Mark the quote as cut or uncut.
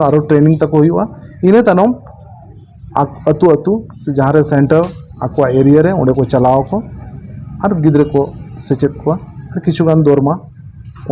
uncut